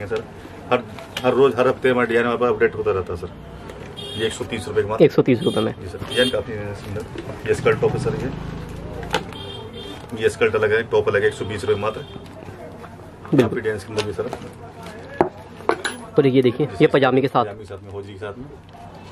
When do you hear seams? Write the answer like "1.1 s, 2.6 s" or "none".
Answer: none